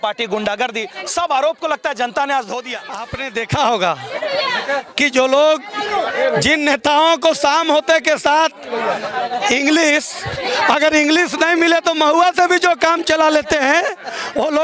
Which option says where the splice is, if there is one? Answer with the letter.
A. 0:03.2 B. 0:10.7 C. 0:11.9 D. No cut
A